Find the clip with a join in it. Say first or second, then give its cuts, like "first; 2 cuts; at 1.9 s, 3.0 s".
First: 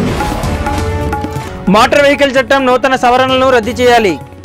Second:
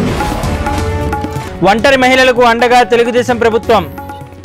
first; 1 cut; at 1.4 s